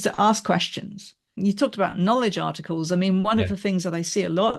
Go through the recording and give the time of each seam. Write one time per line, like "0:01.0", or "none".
0:01.4